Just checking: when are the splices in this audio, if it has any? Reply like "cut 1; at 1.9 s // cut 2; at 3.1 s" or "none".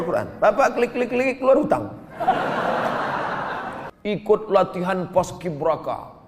cut 1; at 3.8 s